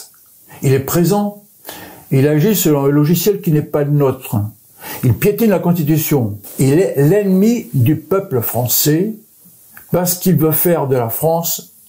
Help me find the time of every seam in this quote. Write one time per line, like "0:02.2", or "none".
0:06.4

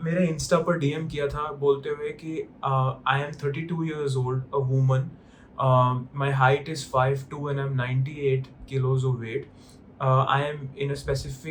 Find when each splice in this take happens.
none

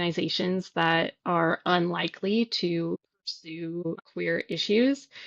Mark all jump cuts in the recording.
0:03.9

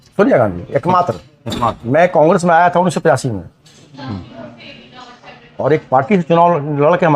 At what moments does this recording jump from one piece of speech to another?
0:01.8

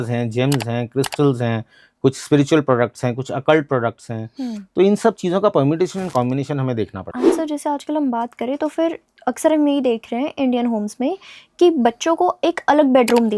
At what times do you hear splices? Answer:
0:07.1

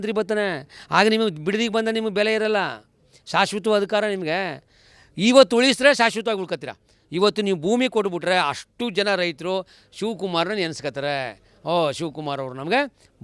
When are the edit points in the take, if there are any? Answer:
none

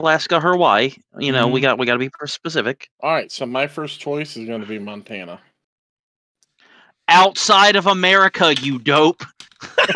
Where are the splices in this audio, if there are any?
0:02.9

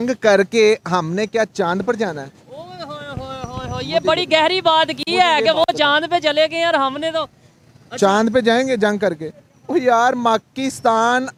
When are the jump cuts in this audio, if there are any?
none

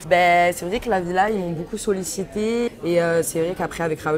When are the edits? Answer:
0:02.7

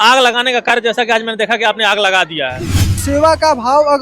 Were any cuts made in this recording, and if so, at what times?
0:03.0

